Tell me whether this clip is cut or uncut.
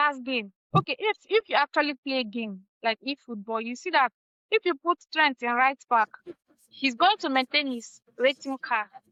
uncut